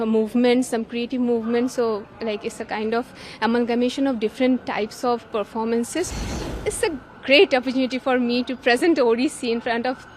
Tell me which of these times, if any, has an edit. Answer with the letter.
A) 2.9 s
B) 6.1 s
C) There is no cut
B